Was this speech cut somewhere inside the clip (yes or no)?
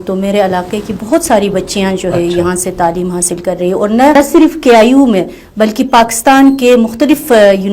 no